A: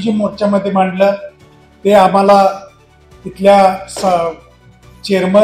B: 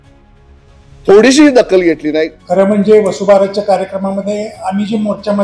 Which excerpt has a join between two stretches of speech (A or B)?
B